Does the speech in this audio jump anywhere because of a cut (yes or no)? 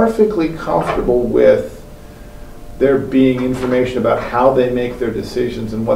no